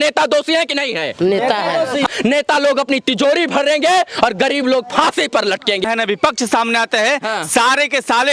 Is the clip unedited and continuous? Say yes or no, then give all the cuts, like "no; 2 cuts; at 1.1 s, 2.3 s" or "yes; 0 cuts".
no; 2 cuts; at 2.1 s, 5.8 s